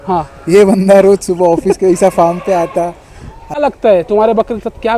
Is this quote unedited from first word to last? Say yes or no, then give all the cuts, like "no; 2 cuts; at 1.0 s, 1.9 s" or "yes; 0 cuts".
no; 1 cut; at 3.6 s